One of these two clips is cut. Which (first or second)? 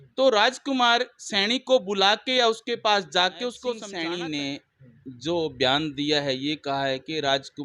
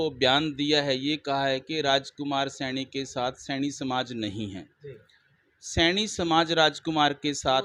first